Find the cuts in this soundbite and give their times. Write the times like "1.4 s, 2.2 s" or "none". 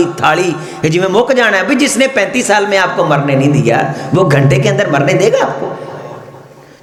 none